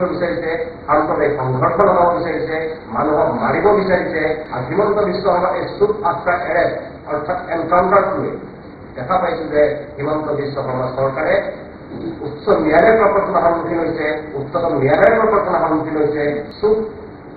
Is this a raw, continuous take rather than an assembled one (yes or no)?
no